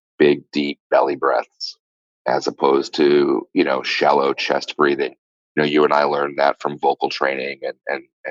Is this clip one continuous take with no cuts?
yes; 0 cuts

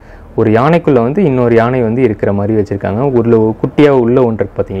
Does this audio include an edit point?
no; 0 cuts

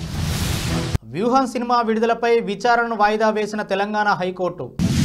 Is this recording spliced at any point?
no; 0 cuts

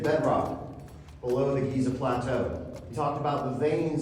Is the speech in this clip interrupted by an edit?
yes; 1 cut; at 2.8 s

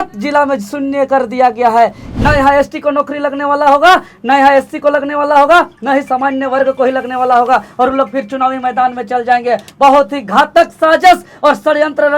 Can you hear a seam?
yes; 1 cut; at 2.1 s

